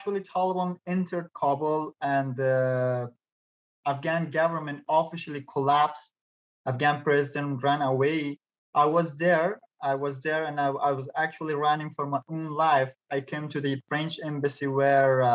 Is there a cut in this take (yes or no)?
no